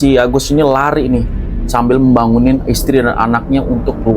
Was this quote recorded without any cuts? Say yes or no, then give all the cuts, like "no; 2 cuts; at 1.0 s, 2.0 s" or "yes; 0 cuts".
yes; 0 cuts